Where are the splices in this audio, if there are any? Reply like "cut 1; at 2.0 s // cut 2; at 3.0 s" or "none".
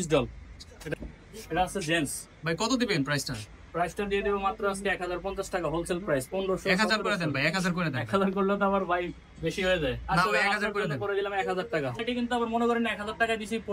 cut 1; at 0.9 s // cut 2; at 12.0 s